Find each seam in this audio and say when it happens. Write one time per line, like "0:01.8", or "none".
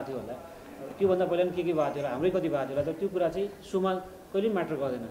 none